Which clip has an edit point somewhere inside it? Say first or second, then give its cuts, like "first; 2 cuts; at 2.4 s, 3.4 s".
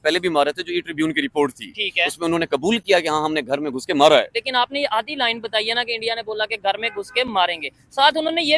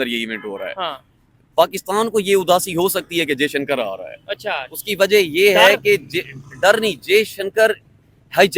first; 1 cut; at 4.4 s